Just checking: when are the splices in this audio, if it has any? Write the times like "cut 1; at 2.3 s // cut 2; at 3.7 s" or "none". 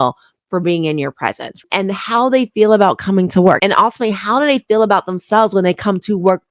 cut 1; at 1.5 s // cut 2; at 3.6 s

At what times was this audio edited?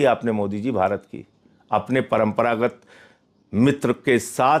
none

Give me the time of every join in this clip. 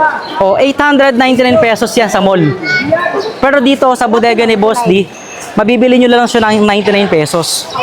none

